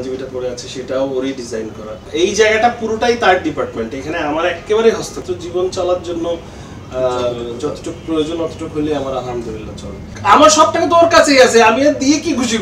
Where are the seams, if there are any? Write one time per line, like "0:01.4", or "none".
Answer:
0:02.1
0:05.1
0:10.1